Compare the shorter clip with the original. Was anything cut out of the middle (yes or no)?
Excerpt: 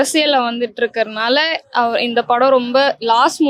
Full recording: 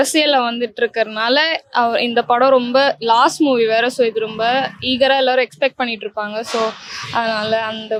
no